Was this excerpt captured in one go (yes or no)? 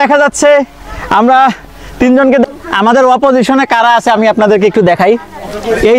no